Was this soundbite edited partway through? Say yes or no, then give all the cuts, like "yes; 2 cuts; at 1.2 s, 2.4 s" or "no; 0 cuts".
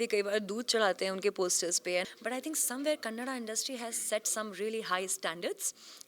yes; 1 cut; at 2.1 s